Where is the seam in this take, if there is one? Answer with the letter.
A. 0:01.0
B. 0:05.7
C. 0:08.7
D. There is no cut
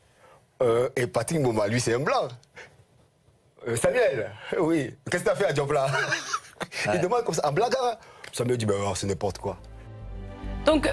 D